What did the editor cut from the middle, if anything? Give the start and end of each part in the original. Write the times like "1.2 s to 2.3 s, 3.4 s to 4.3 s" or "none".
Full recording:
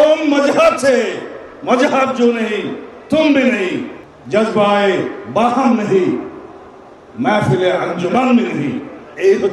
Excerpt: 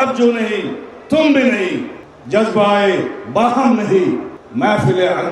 6.4 s to 7.0 s